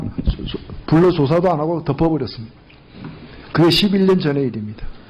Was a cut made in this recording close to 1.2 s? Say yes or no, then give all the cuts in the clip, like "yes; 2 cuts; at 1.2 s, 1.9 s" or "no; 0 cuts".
yes; 1 cut; at 1.2 s